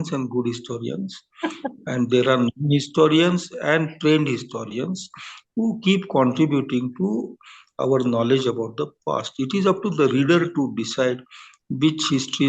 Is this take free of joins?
yes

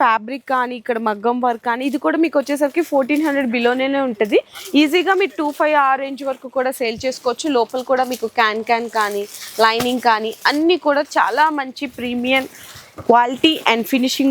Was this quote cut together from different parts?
no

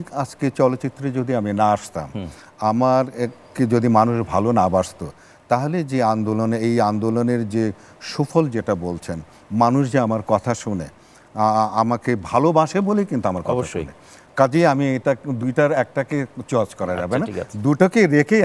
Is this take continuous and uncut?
yes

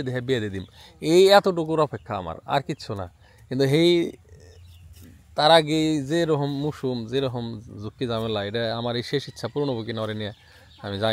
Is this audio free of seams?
yes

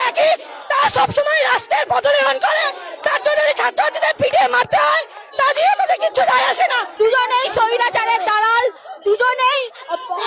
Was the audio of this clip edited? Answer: yes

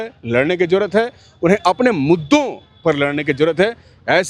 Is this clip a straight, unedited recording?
yes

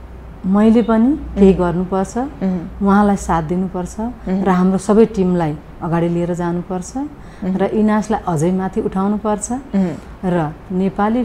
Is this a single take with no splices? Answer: yes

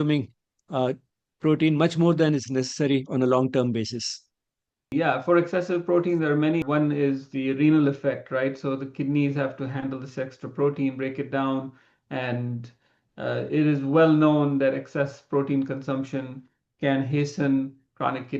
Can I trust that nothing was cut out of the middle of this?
no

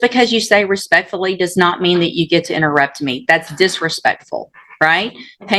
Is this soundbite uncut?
yes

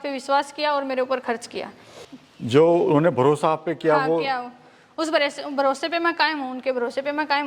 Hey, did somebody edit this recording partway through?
no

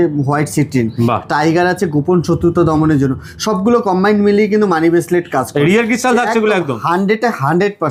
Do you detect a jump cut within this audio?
no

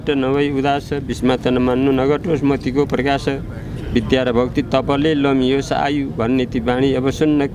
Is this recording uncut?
yes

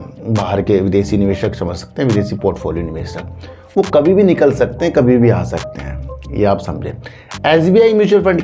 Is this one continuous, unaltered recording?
yes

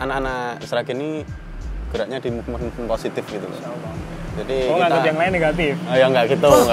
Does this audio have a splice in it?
no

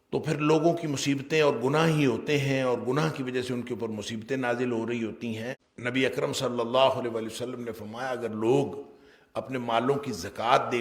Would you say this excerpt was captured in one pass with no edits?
no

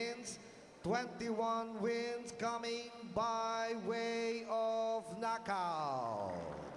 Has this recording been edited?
no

